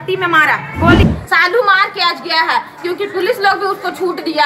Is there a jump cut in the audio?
yes; 1 cut; at 1.1 s

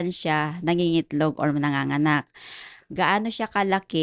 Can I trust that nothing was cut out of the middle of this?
yes; 0 cuts

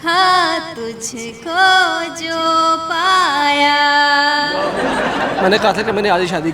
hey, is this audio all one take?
no; 1 cut; at 5.2 s

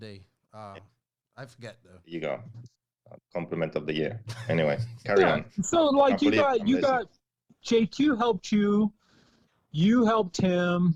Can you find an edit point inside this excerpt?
no; 0 cuts

